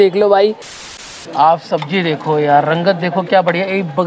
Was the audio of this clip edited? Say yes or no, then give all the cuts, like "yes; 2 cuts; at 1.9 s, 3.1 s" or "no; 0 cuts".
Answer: yes; 1 cut; at 1.1 s